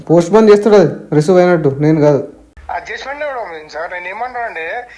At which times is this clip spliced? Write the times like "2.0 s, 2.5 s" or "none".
2.5 s